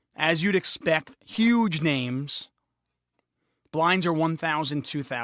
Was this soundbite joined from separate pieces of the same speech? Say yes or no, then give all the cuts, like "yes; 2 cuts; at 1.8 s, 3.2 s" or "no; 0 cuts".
yes; 1 cut; at 3.9 s